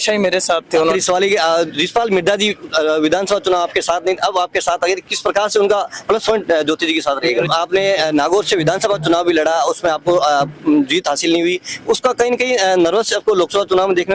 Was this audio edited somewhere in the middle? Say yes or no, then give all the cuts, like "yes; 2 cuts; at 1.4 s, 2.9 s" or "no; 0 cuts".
yes; 2 cuts; at 0.8 s, 7.5 s